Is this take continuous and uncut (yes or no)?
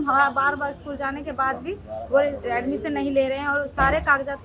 yes